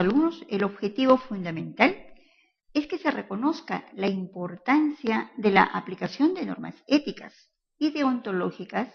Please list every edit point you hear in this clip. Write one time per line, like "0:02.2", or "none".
none